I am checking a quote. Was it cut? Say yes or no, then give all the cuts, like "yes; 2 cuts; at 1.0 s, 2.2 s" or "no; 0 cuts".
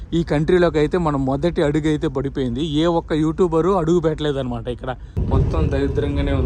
yes; 1 cut; at 5.1 s